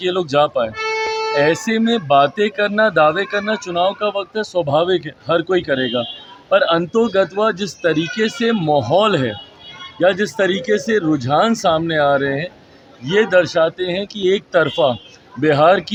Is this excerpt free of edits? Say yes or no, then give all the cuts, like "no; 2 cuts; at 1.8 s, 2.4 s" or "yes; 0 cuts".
yes; 0 cuts